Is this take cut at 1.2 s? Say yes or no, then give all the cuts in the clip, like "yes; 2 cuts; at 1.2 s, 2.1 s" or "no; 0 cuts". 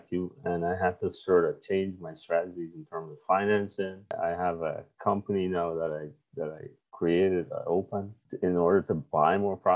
no; 1 cut; at 4.1 s